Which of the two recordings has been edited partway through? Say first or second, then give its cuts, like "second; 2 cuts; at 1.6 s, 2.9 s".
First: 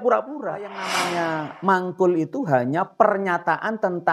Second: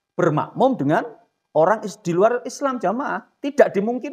first; 1 cut; at 1.1 s